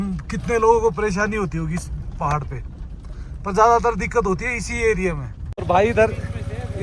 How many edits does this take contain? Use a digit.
1